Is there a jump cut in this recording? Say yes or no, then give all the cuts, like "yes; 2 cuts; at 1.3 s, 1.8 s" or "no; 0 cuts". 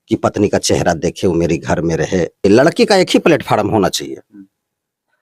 yes; 1 cut; at 2.4 s